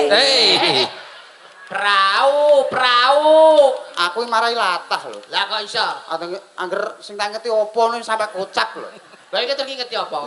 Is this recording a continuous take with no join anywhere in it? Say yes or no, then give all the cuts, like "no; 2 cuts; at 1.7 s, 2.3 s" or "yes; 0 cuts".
yes; 0 cuts